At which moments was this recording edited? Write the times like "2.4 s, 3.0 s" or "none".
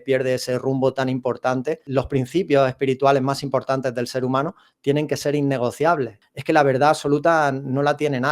1.8 s, 6.2 s